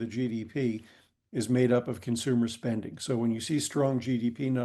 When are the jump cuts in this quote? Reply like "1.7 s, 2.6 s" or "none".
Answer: none